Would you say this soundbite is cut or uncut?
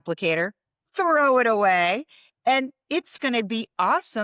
uncut